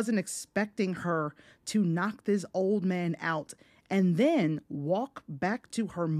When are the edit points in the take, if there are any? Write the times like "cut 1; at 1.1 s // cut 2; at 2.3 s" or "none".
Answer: none